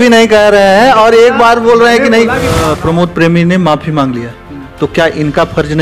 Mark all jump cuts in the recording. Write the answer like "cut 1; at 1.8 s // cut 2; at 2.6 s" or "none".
cut 1; at 2.6 s